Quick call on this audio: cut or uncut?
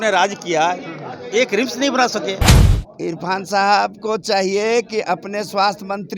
cut